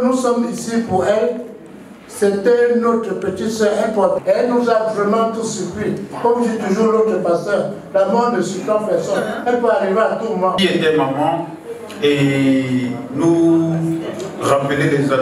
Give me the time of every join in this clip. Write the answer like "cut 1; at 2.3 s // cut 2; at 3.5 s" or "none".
cut 1; at 4.2 s // cut 2; at 10.6 s